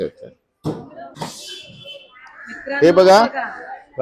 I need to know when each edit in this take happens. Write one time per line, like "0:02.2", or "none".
0:01.1